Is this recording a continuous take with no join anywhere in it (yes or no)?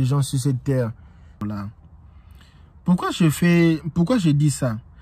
no